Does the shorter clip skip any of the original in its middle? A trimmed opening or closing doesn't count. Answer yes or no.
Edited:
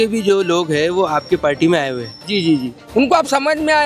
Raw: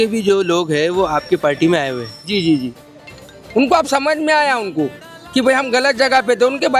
yes